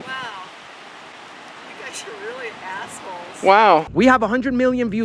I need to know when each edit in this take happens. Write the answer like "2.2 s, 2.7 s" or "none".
3.9 s